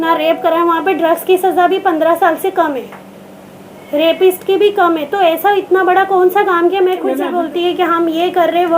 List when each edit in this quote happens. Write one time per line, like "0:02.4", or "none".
0:07.2